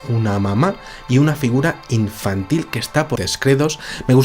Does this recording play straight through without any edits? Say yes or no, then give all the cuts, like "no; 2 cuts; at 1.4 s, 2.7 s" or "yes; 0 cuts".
yes; 0 cuts